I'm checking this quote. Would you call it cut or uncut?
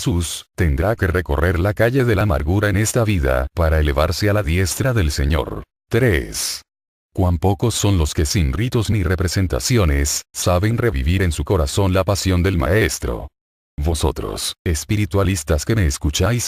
uncut